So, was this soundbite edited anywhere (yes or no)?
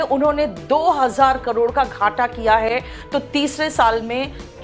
no